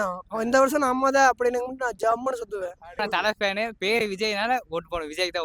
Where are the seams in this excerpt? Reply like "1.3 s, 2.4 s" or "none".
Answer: 3.0 s